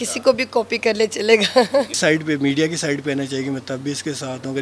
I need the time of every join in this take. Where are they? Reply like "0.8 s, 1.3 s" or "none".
1.9 s